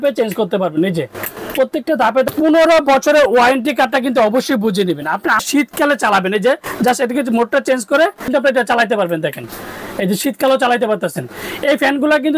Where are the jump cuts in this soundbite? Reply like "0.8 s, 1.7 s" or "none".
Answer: 2.3 s, 5.4 s, 8.3 s